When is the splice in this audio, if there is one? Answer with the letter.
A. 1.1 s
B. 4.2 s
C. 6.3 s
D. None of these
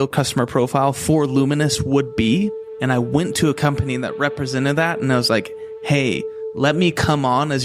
D